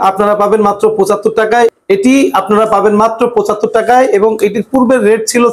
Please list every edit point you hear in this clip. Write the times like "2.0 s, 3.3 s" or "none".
1.7 s

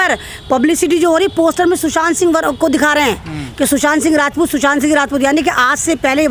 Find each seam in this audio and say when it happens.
none

